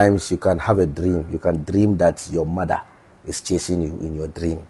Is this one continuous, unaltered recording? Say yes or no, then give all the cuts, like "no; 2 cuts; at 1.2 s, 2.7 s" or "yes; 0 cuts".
yes; 0 cuts